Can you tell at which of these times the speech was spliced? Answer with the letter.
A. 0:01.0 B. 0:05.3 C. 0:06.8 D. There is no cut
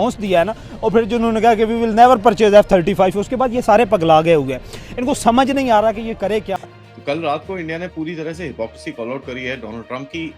C